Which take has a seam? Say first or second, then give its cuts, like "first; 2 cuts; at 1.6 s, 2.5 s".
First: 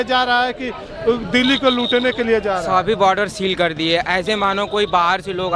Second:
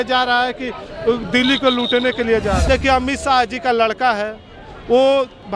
second; 1 cut; at 2.6 s